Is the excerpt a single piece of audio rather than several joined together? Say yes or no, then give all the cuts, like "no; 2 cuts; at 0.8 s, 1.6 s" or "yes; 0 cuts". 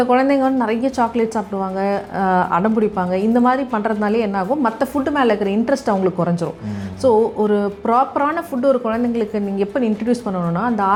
yes; 0 cuts